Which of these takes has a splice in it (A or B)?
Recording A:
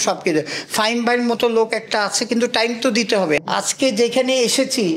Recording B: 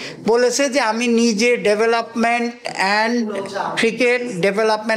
A